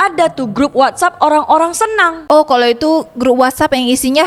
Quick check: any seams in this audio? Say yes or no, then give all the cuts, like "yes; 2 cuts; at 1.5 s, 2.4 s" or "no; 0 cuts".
no; 0 cuts